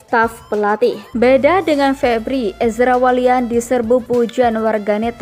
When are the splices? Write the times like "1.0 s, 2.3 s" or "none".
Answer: 1.0 s